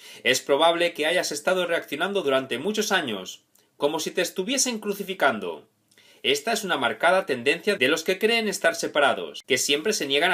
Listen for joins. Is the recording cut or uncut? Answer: uncut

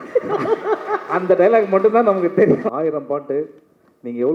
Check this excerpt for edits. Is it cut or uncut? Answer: cut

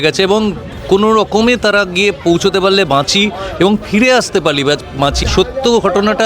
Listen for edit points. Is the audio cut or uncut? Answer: cut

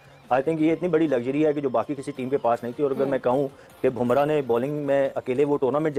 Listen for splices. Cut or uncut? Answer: uncut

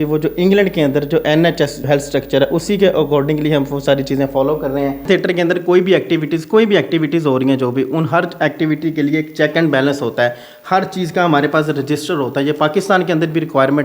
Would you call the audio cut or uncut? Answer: cut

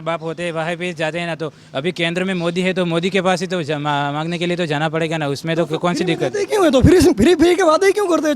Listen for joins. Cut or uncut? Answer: uncut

